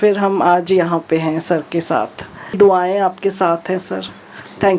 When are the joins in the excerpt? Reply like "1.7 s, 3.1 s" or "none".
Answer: 2.6 s